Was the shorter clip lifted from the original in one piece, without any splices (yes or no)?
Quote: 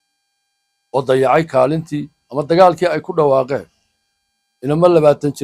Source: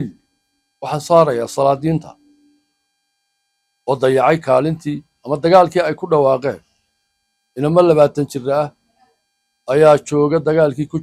yes